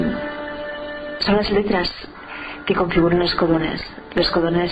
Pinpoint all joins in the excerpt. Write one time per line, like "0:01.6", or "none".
none